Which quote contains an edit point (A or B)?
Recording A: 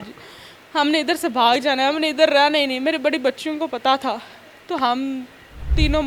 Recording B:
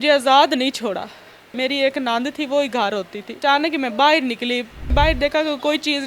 B